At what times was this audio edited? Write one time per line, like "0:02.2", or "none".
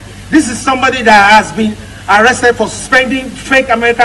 0:02.6